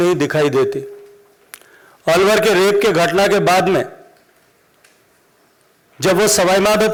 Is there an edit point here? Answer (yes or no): no